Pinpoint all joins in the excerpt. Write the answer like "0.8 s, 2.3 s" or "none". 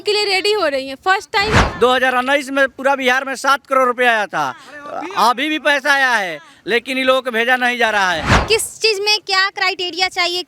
1.6 s, 8.3 s